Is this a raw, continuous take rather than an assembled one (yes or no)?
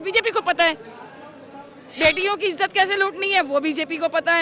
yes